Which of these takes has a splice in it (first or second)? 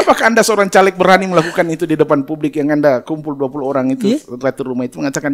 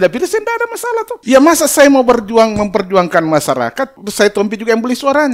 second